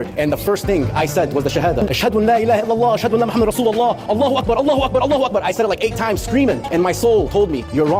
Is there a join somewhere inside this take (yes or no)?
yes